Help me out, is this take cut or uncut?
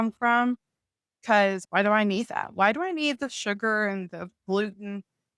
uncut